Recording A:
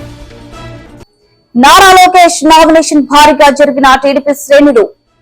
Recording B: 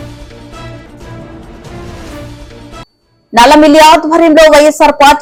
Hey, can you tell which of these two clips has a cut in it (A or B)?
A